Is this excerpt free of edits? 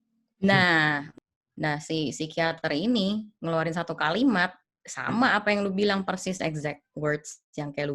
no; 1 cut; at 1.1 s

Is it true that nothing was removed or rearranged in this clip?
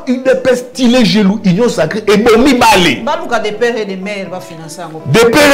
yes; 0 cuts

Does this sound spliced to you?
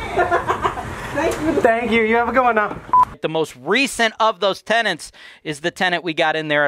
yes; 1 cut; at 3.2 s

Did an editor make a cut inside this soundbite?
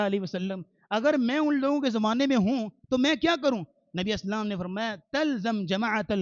no; 0 cuts

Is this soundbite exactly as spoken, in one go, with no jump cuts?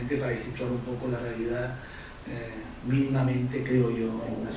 no; 1 cut; at 3.5 s

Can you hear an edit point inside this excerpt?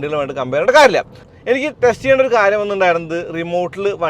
yes; 1 cut; at 1.2 s

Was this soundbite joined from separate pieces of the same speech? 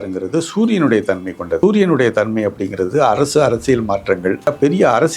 yes; 2 cuts; at 1.6 s, 4.5 s

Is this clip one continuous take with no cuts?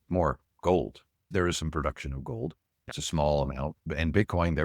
no; 1 cut; at 2.9 s

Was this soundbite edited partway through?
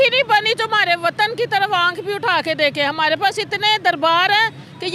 no; 0 cuts

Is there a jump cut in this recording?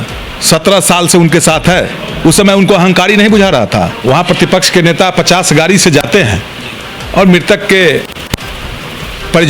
yes; 1 cut; at 4.0 s

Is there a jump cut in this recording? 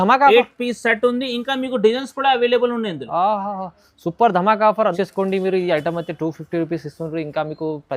yes; 1 cut; at 5.0 s

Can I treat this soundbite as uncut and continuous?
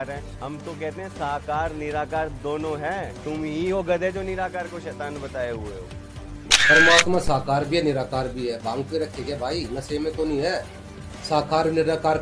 no; 1 cut; at 6.5 s

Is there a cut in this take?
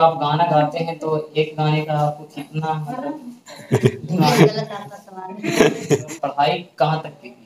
yes; 1 cut; at 6.1 s

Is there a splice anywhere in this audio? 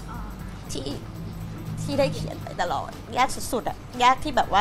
yes; 1 cut; at 3.0 s

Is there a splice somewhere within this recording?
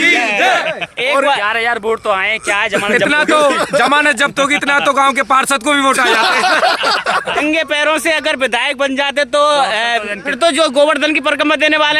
yes; 3 cuts; at 1.5 s, 7.4 s, 10.3 s

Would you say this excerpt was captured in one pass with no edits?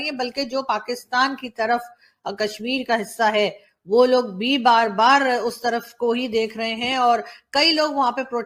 yes; 0 cuts

